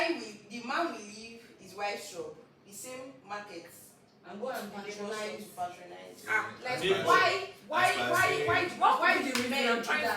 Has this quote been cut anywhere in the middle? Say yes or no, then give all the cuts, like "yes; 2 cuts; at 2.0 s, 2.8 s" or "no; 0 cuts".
no; 0 cuts